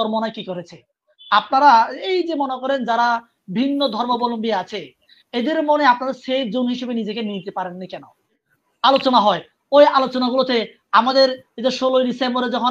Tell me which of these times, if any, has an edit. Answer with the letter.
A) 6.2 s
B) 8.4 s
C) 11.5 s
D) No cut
B